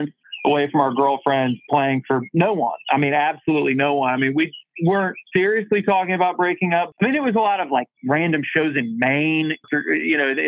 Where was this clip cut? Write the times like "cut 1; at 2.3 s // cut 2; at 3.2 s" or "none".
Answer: cut 1; at 6.9 s // cut 2; at 9.6 s